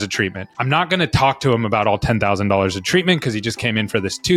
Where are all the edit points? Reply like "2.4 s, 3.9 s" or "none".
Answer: none